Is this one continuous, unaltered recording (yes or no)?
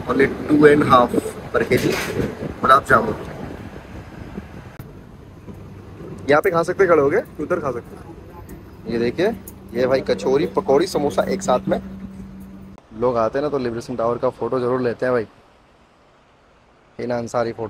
no